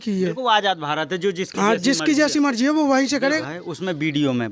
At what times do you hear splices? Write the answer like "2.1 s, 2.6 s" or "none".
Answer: 3.4 s